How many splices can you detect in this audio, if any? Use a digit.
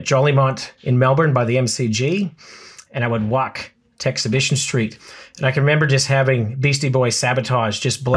0